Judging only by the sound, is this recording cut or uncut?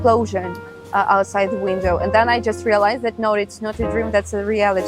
uncut